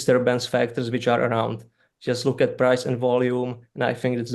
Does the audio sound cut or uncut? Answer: uncut